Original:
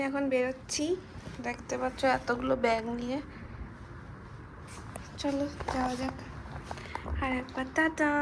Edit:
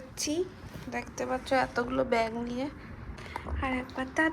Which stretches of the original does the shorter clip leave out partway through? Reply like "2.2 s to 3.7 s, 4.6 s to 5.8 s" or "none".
3.7 s to 6.8 s